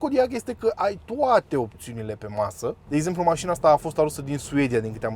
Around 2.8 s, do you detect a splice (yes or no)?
yes